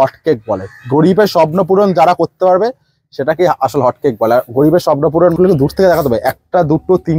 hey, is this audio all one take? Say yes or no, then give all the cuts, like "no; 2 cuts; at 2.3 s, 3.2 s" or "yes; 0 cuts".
no; 1 cut; at 5.3 s